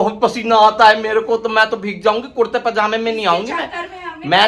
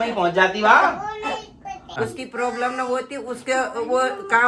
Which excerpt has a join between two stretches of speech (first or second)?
second